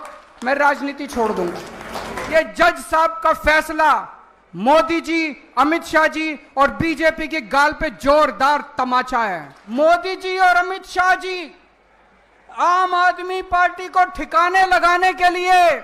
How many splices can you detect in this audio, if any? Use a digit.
2